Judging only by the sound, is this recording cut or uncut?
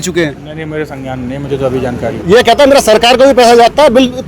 cut